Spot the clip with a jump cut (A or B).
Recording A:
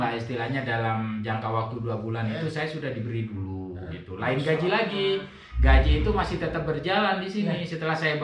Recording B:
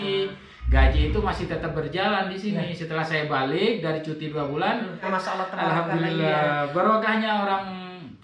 B